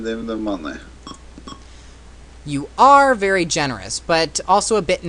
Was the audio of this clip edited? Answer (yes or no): yes